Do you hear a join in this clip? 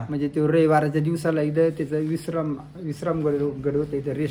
no; 0 cuts

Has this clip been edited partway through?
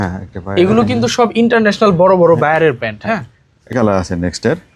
yes; 1 cut; at 3.7 s

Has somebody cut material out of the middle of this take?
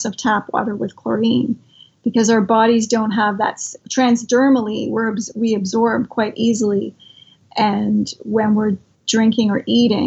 yes; 3 cuts; at 3.8 s, 7.4 s, 8.9 s

